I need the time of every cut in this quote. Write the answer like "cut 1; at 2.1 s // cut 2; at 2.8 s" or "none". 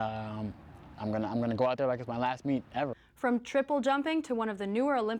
cut 1; at 3.0 s